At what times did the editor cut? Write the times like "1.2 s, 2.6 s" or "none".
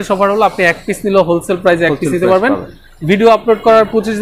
none